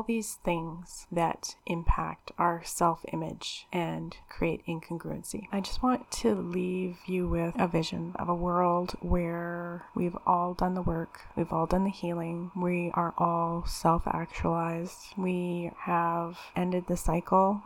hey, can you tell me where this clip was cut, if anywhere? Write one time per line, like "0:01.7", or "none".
0:05.4
0:08.2